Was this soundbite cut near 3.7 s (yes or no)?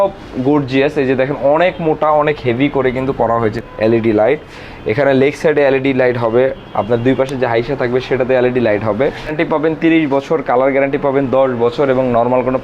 yes